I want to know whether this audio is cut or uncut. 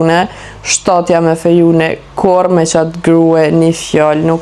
uncut